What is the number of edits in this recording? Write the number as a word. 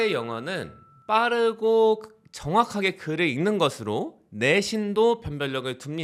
zero